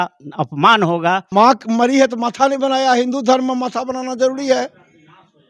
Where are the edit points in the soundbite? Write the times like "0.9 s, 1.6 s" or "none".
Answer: 1.2 s